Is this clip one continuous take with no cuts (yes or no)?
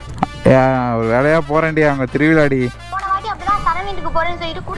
no